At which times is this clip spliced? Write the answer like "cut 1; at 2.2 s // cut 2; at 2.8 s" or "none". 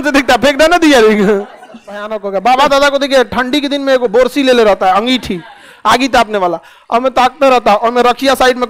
cut 1; at 2.1 s